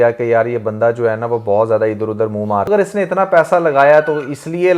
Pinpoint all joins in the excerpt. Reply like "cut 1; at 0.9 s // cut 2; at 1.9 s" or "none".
cut 1; at 2.7 s